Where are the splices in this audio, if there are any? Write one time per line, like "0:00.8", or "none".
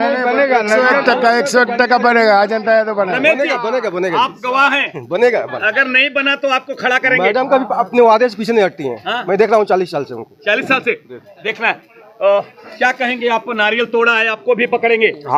none